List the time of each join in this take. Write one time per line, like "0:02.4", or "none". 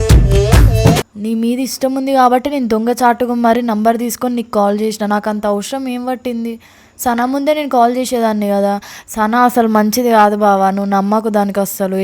0:01.1